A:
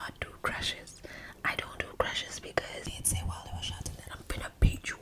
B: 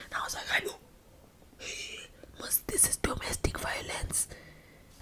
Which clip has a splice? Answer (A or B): A